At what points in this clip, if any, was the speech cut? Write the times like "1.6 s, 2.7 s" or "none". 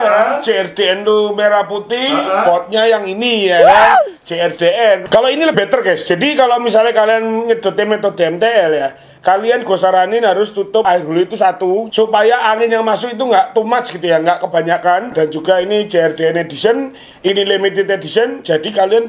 5.5 s, 10.8 s, 15.1 s